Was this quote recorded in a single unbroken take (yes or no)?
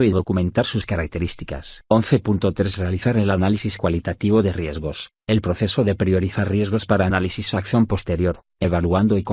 no